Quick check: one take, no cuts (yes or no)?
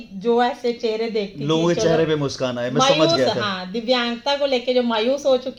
yes